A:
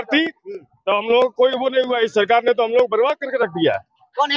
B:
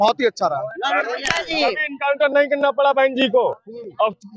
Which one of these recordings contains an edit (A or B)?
B